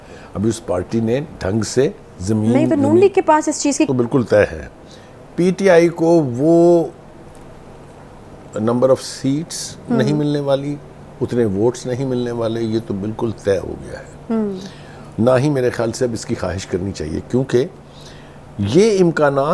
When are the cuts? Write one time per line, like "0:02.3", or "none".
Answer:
0:03.9